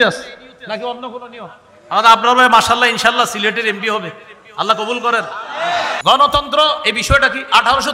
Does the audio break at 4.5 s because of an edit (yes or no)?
no